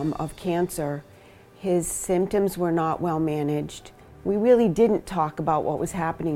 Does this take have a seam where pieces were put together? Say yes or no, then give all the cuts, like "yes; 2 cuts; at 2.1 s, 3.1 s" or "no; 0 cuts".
no; 0 cuts